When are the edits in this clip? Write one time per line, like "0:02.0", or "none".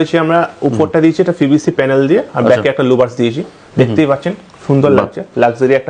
none

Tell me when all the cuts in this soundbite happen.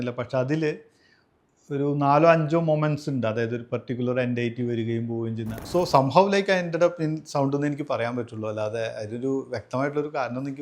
0:05.6

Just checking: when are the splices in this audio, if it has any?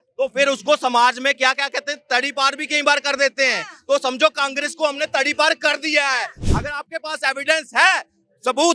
0:06.4

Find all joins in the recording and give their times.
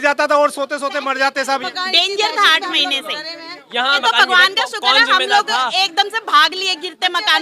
0:01.6
0:04.0

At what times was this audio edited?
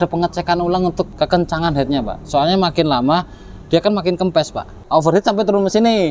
0:01.1
0:04.8

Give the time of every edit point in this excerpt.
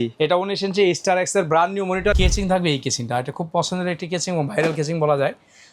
0:02.1

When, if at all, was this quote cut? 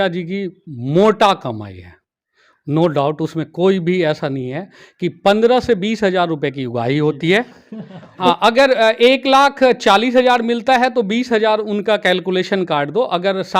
0:08.1

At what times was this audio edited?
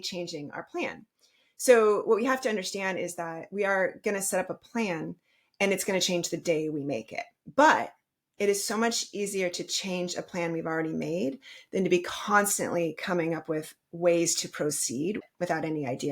0:15.2

